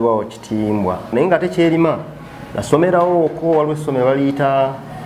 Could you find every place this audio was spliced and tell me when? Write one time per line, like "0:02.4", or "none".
0:01.1